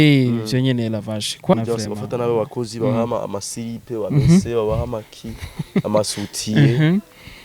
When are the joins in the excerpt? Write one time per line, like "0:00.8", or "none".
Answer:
0:01.5